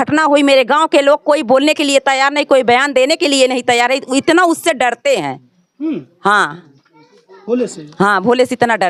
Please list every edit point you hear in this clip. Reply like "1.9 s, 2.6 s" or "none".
none